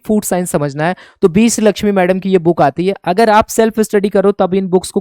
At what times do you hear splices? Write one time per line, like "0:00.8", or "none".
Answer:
none